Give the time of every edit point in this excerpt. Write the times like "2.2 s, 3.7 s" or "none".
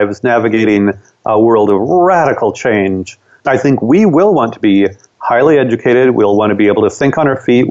none